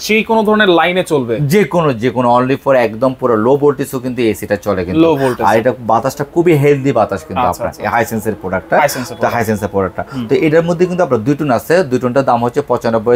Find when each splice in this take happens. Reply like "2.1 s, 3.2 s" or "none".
none